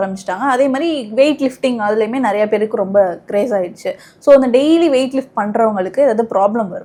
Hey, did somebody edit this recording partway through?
no; 0 cuts

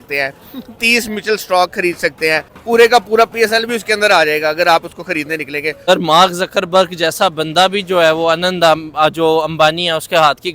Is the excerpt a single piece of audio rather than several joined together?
no; 2 cuts; at 2.5 s, 5.8 s

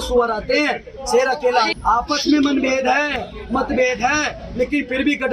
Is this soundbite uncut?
no; 1 cut; at 1.7 s

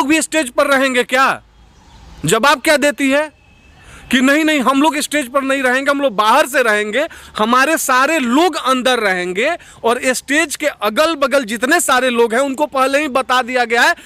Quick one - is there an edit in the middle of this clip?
no; 0 cuts

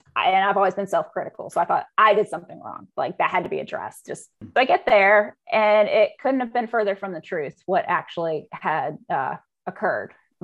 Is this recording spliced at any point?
yes; 1 cut; at 4.4 s

